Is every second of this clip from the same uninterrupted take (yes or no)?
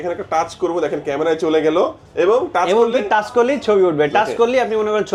yes